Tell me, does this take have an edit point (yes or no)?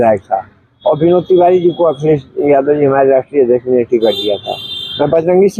no